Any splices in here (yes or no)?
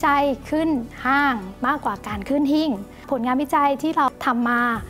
yes